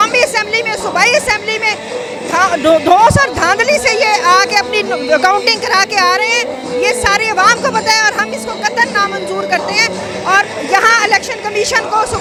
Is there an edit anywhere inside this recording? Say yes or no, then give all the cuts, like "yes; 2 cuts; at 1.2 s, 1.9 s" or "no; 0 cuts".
no; 0 cuts